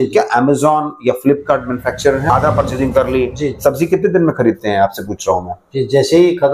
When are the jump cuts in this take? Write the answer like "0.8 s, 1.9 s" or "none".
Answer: 2.3 s